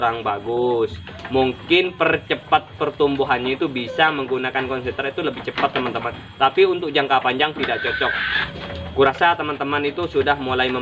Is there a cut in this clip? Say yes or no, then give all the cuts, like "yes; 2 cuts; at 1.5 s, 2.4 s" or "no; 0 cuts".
yes; 1 cut; at 8.4 s